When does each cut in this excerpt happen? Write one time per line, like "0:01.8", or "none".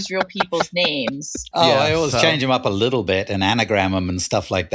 0:01.5